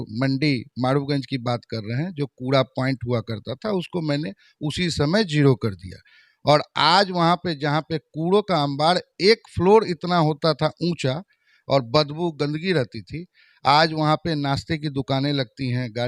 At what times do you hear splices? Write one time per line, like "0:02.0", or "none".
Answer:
none